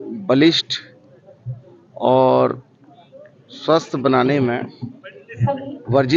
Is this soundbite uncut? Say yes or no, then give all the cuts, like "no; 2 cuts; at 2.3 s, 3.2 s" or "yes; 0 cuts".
yes; 0 cuts